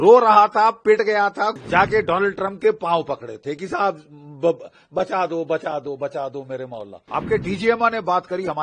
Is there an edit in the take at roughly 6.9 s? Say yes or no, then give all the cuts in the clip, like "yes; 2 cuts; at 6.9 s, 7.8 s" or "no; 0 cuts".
yes; 2 cuts; at 1.6 s, 6.9 s